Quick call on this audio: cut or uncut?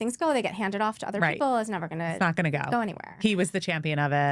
uncut